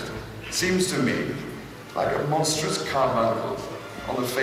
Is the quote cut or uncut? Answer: uncut